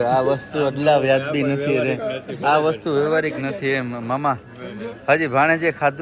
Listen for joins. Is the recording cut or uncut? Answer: uncut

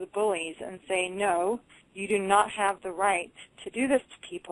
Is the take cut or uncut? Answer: uncut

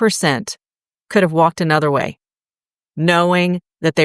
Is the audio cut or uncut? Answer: uncut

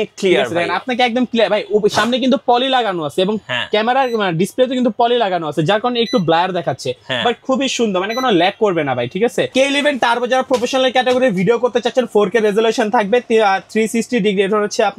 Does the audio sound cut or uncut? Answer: cut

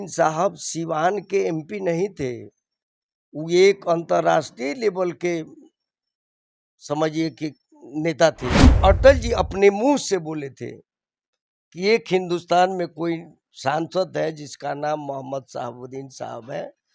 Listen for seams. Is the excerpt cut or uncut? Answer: cut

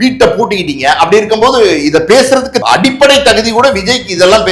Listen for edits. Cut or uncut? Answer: cut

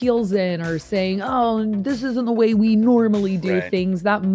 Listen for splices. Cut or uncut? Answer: uncut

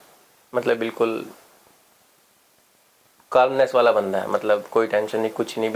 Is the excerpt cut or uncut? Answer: uncut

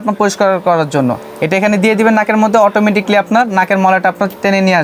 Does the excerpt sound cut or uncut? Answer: uncut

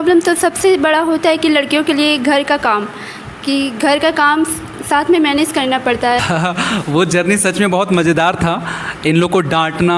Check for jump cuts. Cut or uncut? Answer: cut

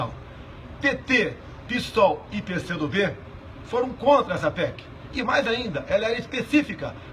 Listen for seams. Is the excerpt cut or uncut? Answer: cut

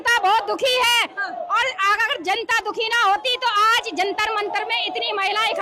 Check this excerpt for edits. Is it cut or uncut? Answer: uncut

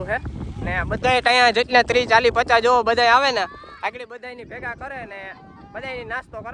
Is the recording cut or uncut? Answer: uncut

